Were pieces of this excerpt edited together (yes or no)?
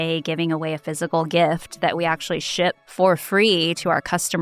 yes